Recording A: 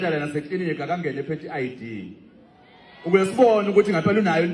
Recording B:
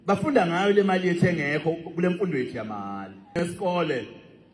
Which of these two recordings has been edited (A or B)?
B